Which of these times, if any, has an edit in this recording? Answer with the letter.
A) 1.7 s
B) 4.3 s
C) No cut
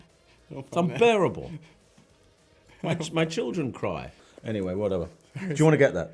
B